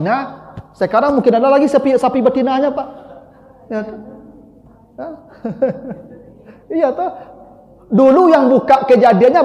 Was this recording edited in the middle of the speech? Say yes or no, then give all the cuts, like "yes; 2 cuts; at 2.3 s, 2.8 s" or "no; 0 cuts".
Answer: no; 0 cuts